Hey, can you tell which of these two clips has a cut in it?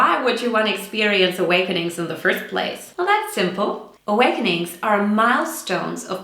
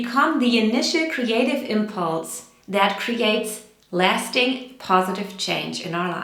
first; 2 cuts; at 2.8 s, 3.9 s

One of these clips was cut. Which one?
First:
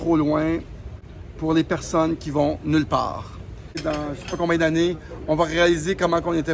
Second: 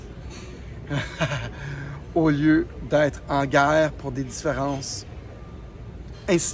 first; 2 cuts; at 1.0 s, 3.8 s

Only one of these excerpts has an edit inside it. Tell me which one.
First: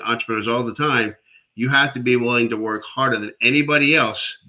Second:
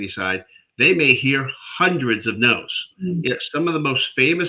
second; 1 cut; at 2.9 s

